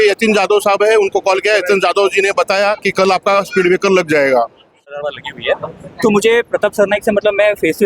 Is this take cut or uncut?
cut